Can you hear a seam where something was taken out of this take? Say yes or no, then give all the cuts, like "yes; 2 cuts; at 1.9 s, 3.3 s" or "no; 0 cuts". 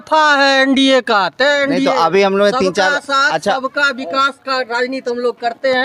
no; 0 cuts